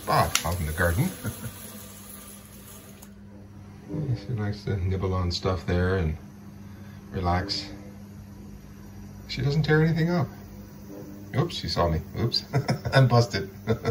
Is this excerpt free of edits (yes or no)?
no